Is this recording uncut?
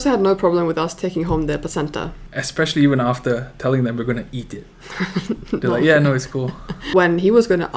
yes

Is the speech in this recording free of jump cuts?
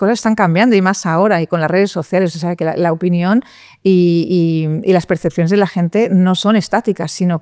yes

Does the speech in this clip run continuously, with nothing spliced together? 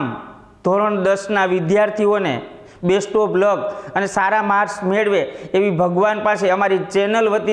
yes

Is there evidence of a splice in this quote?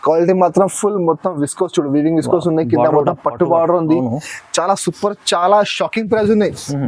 no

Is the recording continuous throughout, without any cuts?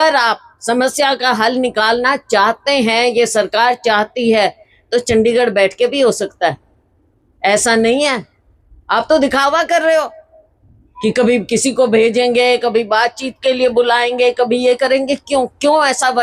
yes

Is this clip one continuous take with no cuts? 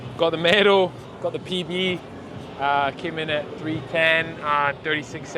yes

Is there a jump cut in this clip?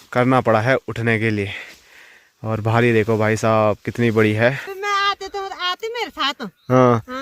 yes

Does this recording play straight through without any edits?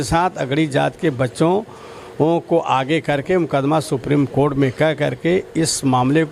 yes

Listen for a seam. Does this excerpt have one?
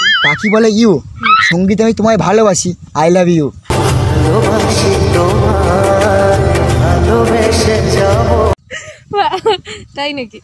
no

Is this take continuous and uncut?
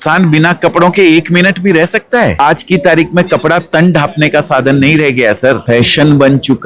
no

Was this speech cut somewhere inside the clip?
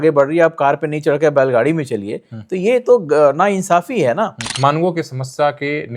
yes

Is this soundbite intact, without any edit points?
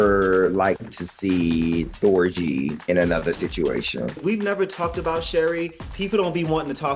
no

